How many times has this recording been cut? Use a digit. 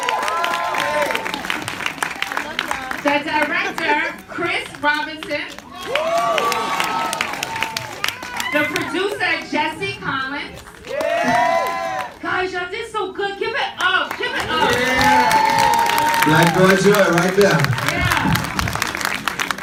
0